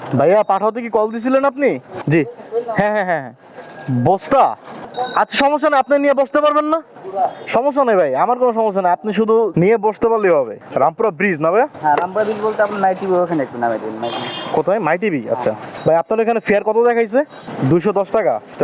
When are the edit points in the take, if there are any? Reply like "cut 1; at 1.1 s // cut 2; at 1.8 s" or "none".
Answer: none